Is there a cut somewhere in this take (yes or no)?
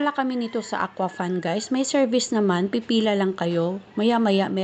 no